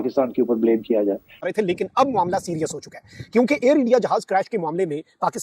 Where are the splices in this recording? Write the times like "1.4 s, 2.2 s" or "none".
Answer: 1.4 s